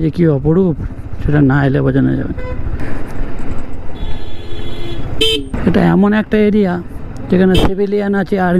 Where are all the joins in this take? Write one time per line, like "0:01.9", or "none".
0:02.8
0:05.5

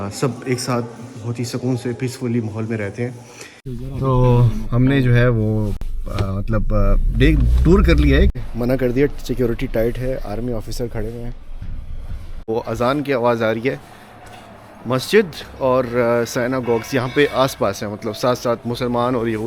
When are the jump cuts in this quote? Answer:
0:03.7
0:08.4
0:12.4

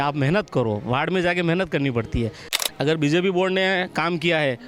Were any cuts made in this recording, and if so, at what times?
0:02.6

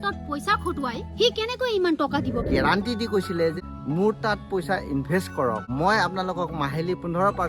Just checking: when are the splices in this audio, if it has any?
0:02.5
0:03.6
0:05.7

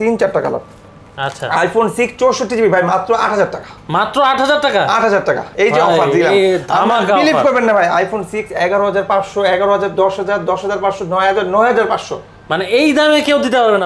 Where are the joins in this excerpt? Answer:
none

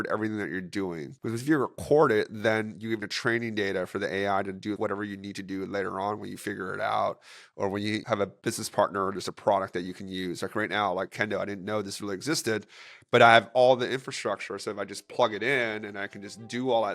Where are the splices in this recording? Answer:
0:01.1
0:03.1
0:04.8
0:08.1

